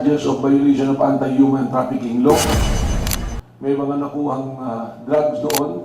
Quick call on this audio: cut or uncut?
cut